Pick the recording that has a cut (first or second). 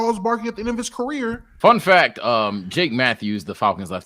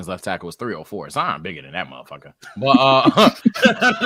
first